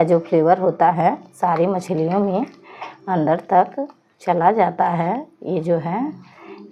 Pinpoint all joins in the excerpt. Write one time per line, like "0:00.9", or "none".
none